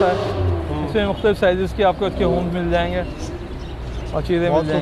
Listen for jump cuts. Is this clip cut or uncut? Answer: uncut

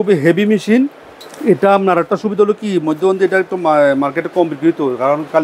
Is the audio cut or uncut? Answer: uncut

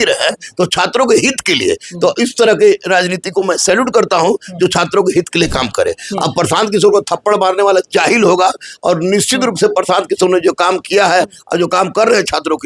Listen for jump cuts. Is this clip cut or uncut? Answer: uncut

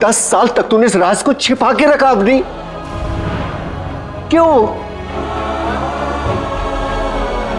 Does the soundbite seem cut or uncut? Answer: uncut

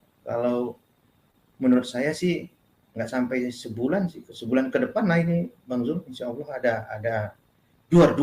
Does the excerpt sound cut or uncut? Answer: uncut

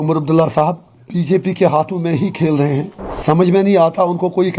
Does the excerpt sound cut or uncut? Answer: cut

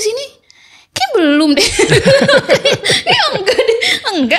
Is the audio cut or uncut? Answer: uncut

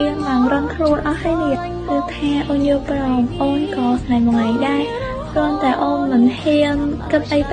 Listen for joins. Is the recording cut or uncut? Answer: uncut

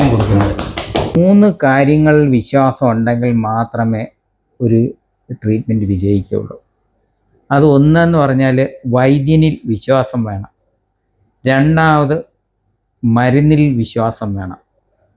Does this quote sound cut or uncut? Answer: cut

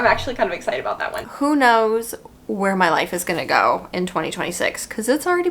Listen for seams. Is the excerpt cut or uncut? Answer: cut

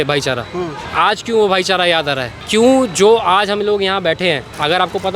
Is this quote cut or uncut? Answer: uncut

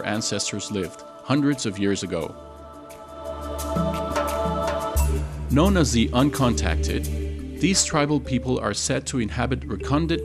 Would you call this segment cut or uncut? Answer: cut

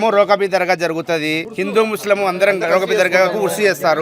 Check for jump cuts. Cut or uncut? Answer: cut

